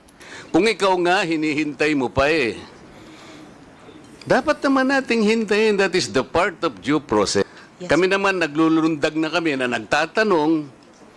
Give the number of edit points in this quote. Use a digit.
1